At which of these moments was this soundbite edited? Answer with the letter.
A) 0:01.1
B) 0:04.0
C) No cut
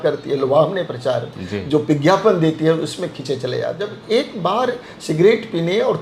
B